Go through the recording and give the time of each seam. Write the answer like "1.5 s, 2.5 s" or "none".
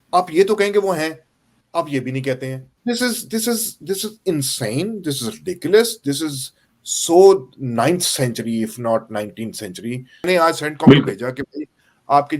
2.7 s, 10.2 s